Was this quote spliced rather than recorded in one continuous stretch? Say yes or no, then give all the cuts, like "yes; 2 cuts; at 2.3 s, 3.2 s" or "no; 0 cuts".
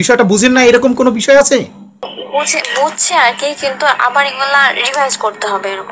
no; 0 cuts